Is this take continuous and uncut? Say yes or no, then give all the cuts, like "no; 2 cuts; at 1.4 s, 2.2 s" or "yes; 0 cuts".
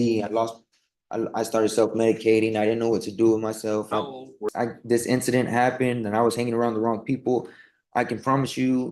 no; 1 cut; at 4.5 s